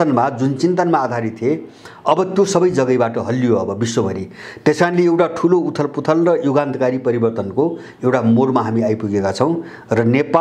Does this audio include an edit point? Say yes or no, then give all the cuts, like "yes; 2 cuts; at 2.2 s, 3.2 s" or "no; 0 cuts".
no; 0 cuts